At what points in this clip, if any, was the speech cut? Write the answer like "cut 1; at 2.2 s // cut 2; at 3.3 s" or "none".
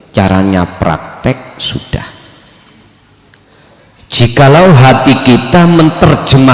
cut 1; at 3.6 s